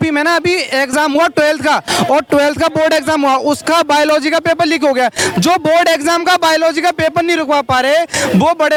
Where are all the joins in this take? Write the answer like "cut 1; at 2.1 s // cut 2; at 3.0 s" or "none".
none